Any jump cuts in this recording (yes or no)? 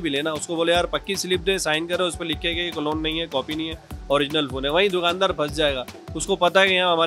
no